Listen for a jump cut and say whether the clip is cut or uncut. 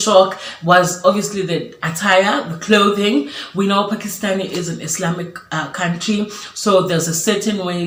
uncut